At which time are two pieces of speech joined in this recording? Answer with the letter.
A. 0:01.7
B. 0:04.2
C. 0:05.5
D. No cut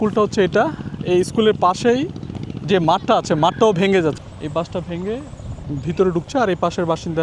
B